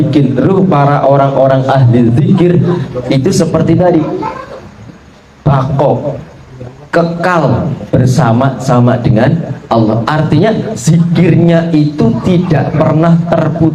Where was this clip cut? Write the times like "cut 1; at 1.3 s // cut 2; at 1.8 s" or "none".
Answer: none